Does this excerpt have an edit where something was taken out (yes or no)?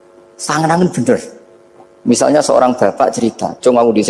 no